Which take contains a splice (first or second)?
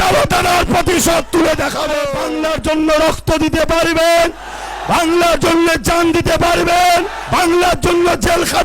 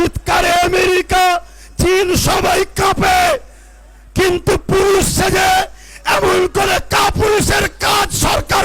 first